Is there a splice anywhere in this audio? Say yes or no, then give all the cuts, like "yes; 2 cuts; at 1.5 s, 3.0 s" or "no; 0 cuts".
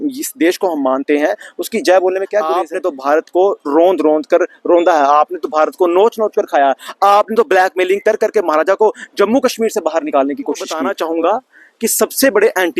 yes; 2 cuts; at 2.6 s, 10.8 s